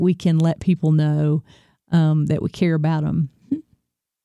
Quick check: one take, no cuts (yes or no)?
yes